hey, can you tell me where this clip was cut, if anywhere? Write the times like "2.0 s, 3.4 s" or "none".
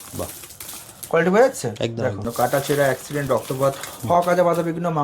2.3 s